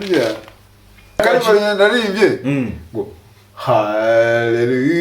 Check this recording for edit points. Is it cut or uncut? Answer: cut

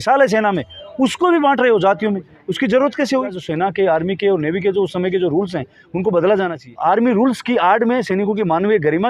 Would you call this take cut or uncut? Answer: cut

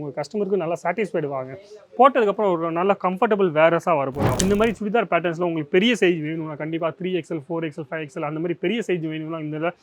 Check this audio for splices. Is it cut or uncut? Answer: cut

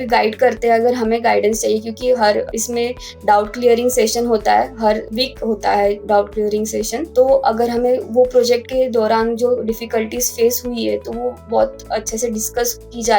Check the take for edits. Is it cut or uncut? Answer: cut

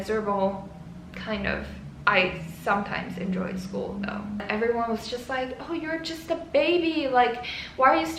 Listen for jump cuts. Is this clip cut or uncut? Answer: cut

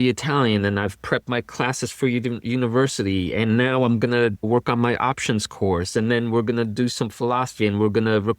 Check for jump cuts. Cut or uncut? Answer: cut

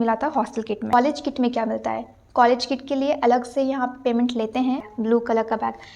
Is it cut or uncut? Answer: cut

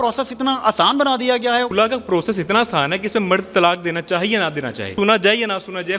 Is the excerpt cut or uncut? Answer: cut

